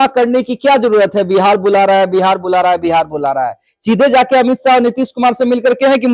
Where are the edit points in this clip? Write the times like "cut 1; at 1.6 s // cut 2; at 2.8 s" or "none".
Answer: none